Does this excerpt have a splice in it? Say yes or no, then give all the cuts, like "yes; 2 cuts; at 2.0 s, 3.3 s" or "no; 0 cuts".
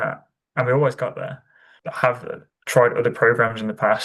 yes; 1 cut; at 1.6 s